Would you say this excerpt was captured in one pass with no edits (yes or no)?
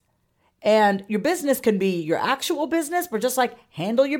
yes